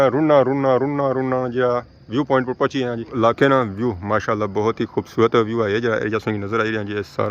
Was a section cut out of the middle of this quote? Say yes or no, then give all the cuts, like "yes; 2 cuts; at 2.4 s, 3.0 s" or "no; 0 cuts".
yes; 1 cut; at 3.1 s